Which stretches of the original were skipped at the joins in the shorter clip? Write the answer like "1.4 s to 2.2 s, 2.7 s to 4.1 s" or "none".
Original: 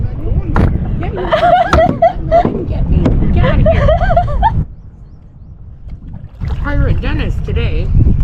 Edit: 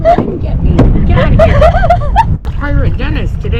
4.8 s to 6.5 s